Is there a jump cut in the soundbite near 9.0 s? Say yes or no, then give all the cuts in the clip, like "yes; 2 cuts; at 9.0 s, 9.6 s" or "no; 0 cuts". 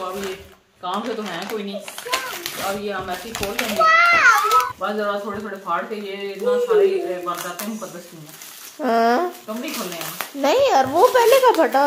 no; 1 cut; at 4.6 s